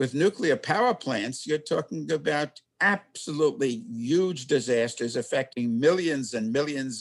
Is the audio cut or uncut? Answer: cut